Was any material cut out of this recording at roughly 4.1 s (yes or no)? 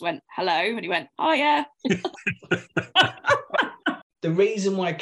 yes